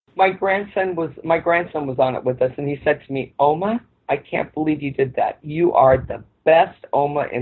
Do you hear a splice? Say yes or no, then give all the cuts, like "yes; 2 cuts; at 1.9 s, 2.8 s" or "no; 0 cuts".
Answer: no; 0 cuts